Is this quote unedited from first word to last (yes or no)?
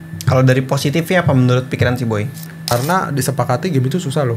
no